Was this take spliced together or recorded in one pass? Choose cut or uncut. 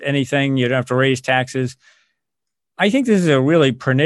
uncut